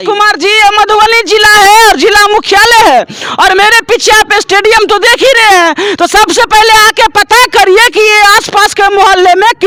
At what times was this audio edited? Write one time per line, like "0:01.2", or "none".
none